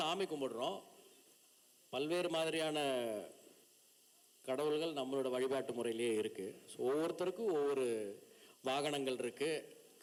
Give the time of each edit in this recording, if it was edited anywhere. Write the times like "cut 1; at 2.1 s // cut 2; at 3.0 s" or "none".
none